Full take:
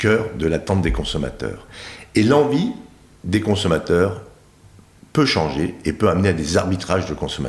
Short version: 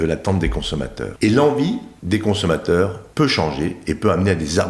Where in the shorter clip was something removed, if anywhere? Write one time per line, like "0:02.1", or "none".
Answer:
0:01.0
0:01.9
0:03.0